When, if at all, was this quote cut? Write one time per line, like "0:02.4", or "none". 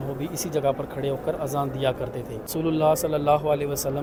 none